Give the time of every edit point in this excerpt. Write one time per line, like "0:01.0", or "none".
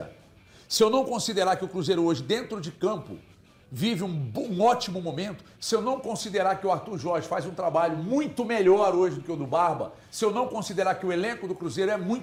none